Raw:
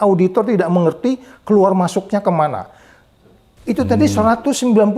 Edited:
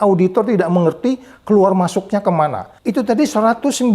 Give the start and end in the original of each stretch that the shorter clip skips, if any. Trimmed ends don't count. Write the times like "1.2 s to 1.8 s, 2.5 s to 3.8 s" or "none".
2.7 s to 3.5 s